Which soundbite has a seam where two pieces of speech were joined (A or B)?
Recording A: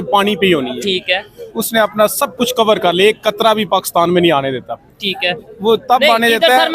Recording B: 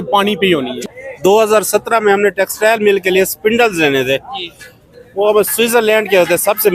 B